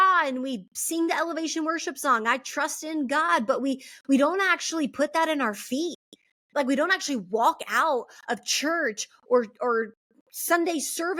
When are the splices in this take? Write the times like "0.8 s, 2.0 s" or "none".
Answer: none

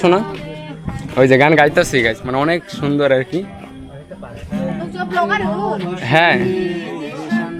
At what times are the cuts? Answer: none

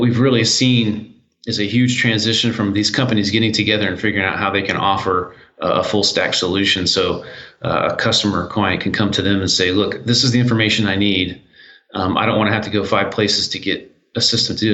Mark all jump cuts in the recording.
none

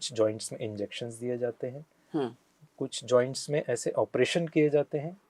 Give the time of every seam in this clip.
none

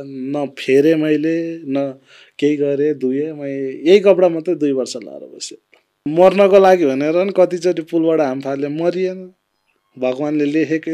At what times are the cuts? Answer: 6.0 s

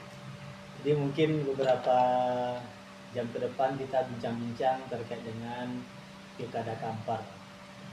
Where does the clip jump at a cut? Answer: none

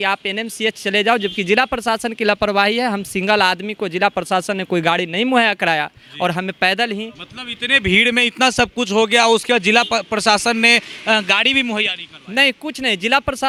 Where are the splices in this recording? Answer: none

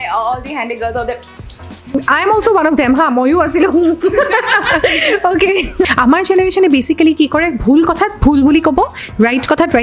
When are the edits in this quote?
5.9 s

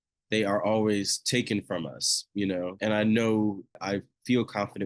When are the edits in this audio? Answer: 2.7 s, 3.8 s

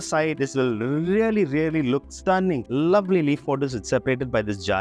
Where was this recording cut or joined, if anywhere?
2.7 s

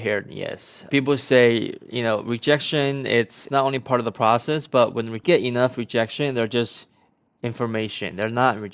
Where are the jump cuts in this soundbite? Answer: 0.9 s, 3.4 s, 5.2 s

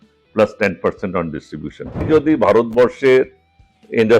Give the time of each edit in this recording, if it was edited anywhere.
2.0 s

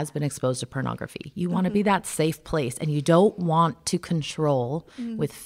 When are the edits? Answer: none

